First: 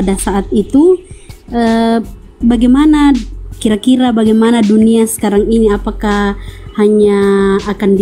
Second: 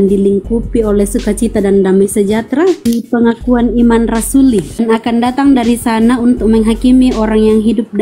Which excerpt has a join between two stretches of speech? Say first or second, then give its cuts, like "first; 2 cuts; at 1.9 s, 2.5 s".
second; 2 cuts; at 2.8 s, 4.8 s